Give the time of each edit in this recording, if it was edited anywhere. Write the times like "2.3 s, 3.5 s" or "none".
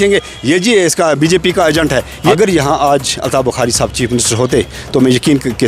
2.2 s